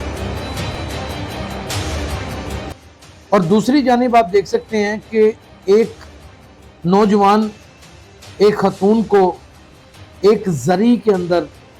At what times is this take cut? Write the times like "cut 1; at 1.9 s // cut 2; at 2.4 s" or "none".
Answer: cut 1; at 2.7 s